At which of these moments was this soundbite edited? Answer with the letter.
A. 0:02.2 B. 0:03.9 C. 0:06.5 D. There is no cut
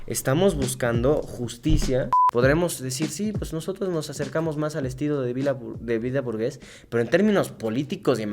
A